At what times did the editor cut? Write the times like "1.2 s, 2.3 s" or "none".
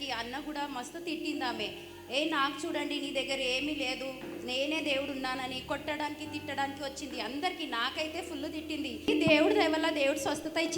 9.1 s